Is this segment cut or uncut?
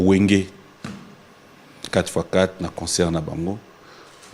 uncut